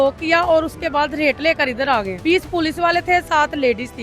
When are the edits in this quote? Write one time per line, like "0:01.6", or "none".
0:02.1